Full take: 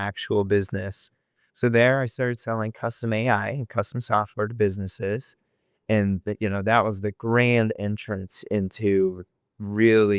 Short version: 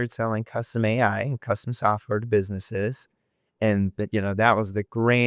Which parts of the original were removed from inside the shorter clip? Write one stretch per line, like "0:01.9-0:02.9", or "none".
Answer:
none